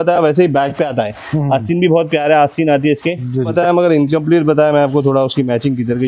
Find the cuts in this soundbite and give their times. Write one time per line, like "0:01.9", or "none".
0:03.5